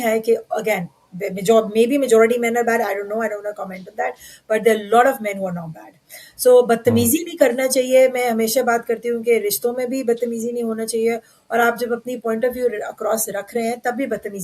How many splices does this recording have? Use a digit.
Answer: 0